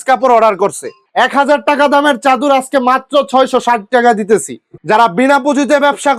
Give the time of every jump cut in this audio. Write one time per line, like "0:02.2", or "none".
0:00.9
0:04.6